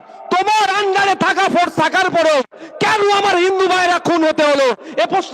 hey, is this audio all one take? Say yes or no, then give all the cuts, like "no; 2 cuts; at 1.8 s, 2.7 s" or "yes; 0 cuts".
yes; 0 cuts